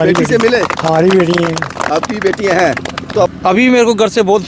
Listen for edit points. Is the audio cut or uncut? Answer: cut